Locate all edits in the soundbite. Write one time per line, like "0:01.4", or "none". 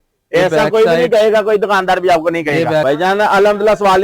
0:02.8